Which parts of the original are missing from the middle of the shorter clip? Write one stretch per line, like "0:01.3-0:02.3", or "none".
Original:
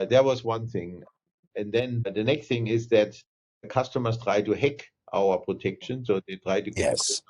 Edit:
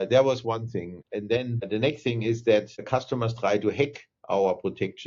0:01.5-0:02.0
0:03.2-0:03.6